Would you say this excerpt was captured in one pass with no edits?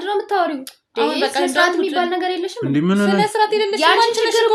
yes; 0 cuts

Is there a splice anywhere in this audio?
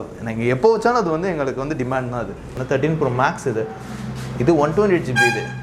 yes; 1 cut; at 2.5 s

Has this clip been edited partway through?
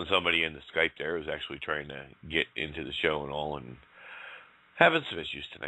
no; 0 cuts

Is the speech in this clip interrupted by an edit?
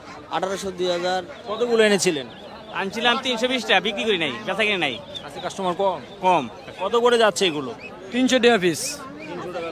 yes; 2 cuts; at 1.4 s, 6.6 s

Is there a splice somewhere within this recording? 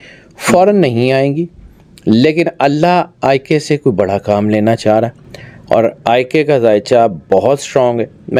no; 0 cuts

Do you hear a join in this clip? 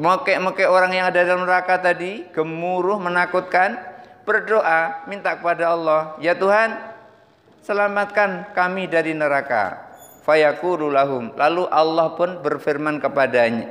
no; 0 cuts

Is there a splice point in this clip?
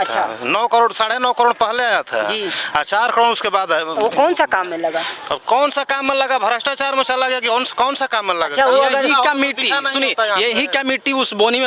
no; 0 cuts

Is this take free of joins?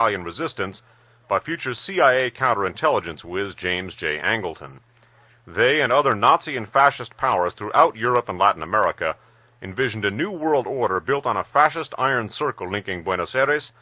yes; 0 cuts

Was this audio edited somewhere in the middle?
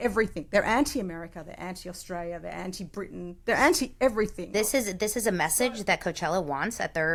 no; 0 cuts

